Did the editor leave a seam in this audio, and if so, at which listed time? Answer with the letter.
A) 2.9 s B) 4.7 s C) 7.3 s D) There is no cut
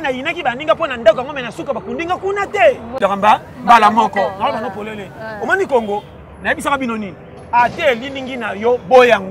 A